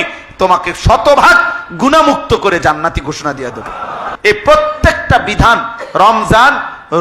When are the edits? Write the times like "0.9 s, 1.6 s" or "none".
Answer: 4.0 s